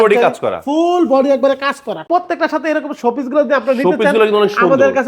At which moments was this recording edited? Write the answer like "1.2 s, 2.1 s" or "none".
2.0 s